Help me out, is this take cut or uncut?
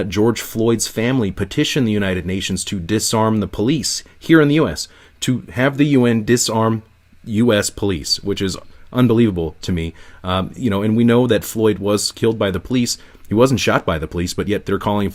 uncut